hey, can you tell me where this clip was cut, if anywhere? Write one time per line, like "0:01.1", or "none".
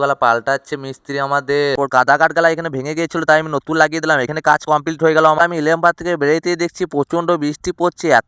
0:01.8
0:05.4